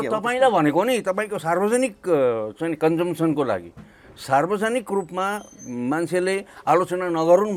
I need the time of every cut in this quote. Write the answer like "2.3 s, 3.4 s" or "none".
none